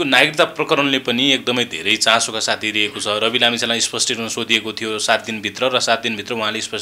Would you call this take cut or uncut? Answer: uncut